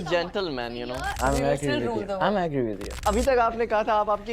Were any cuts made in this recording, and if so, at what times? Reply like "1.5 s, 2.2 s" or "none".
1.2 s, 3.0 s